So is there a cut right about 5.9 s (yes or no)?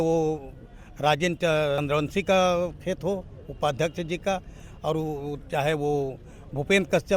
no